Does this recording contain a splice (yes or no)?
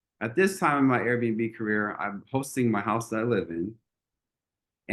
no